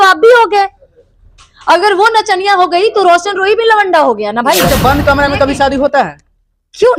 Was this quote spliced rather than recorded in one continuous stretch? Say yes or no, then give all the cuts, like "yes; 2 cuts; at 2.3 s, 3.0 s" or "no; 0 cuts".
yes; 1 cut; at 4.6 s